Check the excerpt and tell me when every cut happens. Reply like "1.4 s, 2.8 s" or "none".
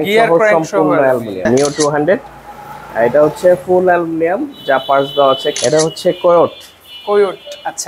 1.4 s, 5.6 s